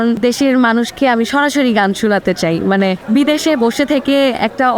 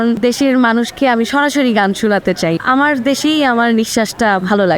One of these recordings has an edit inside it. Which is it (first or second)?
second